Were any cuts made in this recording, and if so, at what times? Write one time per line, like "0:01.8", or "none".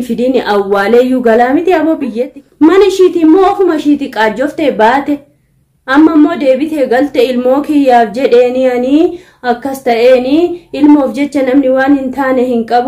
0:02.2